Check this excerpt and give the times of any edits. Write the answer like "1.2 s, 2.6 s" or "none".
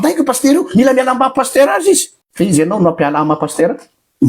2.2 s